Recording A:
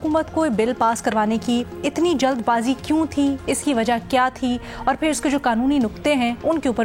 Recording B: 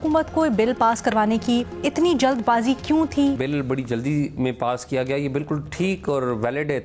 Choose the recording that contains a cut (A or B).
B